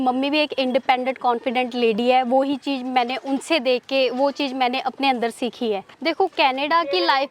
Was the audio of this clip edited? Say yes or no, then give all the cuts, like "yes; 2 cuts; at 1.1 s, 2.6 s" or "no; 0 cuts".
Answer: yes; 1 cut; at 5.9 s